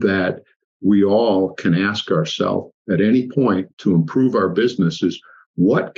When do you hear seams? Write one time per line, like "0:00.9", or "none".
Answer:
none